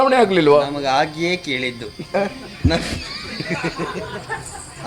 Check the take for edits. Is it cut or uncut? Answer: uncut